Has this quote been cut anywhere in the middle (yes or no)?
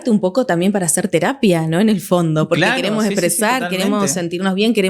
no